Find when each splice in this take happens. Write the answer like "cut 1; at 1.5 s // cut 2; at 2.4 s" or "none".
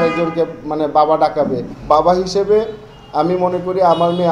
cut 1; at 1.7 s